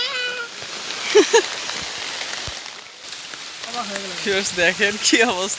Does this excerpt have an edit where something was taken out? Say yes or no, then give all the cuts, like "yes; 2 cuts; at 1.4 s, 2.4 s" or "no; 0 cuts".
no; 0 cuts